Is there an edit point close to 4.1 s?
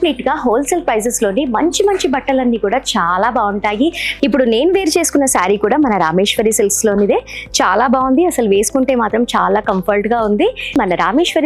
yes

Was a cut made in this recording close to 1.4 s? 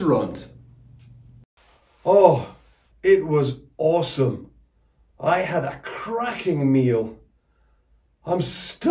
yes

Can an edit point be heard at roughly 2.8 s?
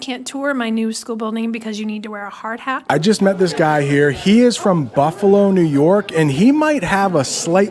yes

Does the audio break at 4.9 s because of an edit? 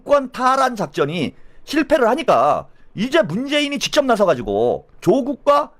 yes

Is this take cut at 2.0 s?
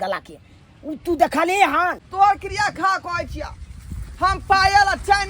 yes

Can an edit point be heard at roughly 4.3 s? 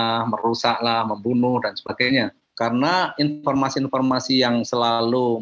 no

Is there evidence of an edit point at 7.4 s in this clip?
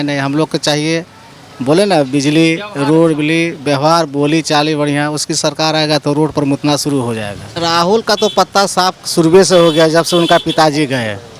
yes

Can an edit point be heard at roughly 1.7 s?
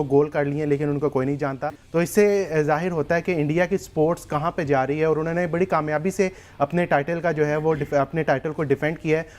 yes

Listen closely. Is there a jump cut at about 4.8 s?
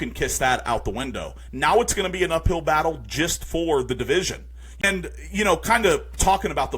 yes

